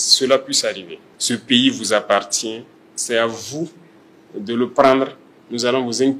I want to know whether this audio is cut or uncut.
cut